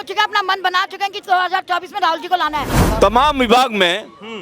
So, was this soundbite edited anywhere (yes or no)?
yes